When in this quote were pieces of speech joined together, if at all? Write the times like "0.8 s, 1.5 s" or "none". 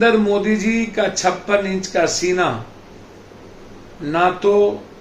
none